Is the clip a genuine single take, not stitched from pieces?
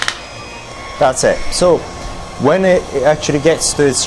yes; 0 cuts

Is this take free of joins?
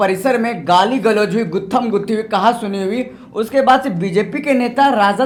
yes; 0 cuts

